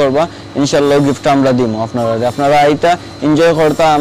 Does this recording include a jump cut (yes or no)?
no